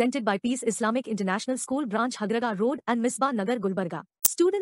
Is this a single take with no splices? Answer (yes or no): yes